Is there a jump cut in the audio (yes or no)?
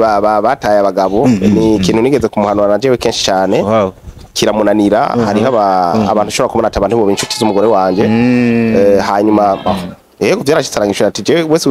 no